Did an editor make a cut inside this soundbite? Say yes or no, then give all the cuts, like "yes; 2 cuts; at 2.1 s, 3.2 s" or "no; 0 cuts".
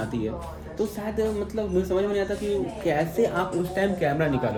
no; 0 cuts